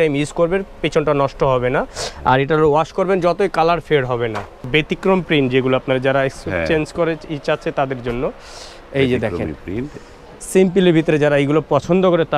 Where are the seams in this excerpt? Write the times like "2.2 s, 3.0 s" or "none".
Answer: 4.7 s